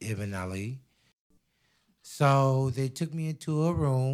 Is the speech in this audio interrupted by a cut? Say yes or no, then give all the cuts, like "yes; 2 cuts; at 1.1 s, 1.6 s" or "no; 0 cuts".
yes; 1 cut; at 1.2 s